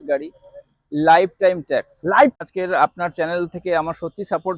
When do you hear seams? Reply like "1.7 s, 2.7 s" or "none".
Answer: 2.3 s